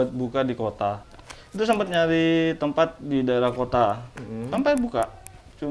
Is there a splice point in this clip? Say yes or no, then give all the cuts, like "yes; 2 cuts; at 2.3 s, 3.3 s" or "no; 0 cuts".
yes; 1 cut; at 1.1 s